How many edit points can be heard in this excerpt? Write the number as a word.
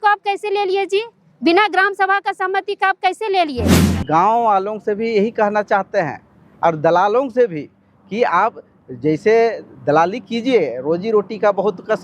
one